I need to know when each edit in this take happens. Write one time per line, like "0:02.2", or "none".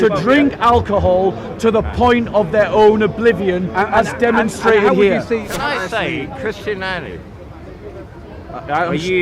0:05.5